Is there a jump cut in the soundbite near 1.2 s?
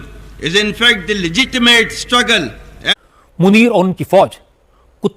no; 1 cut; at 2.9 s

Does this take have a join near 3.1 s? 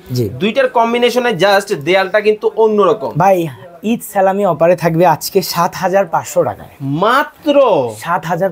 no; 0 cuts

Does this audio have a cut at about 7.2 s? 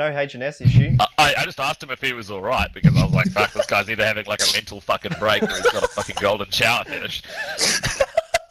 no; 0 cuts

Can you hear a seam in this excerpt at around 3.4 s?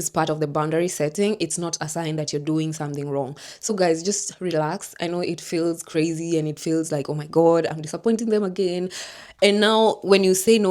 no; 0 cuts

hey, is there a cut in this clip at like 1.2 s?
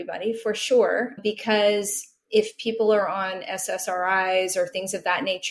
yes; 1 cut; at 1.2 s

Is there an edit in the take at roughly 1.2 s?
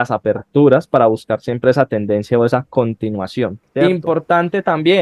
no; 1 cut; at 3.6 s

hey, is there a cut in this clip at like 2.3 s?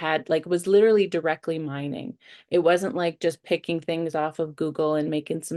no; 0 cuts

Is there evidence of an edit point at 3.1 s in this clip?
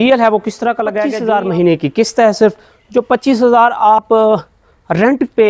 no; 1 cut; at 1.0 s

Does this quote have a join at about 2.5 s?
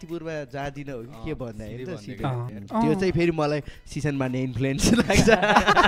yes; 1 cut; at 2.5 s

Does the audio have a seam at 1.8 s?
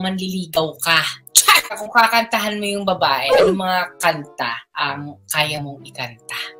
yes; 1 cut; at 1.8 s

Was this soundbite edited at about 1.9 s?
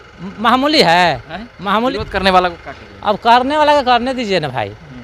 yes; 1 cut; at 1.9 s

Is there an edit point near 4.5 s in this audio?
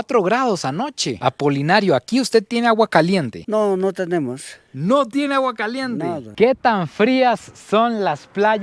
no; 2 cuts; at 1.2 s, 6.3 s

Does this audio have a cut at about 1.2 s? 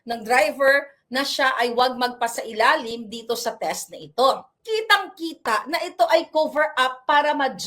no; 1 cut; at 4.5 s

